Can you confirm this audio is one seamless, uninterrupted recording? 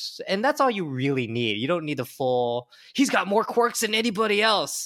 yes; 0 cuts

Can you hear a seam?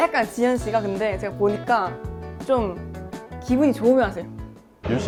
no; 0 cuts

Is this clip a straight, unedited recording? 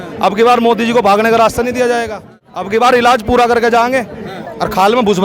no; 1 cut; at 2.7 s

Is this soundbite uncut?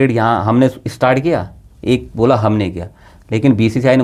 yes; 0 cuts

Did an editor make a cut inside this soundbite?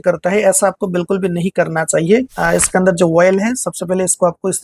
yes; 1 cut; at 2.3 s

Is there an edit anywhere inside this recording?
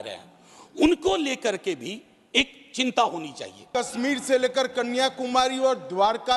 yes; 1 cut; at 3.7 s

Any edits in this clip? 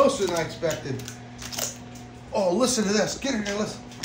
no; 0 cuts

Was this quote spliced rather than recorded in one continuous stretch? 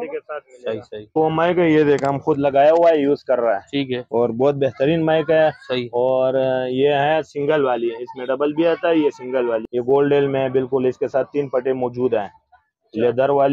yes; 2 cuts; at 1.2 s, 9.6 s

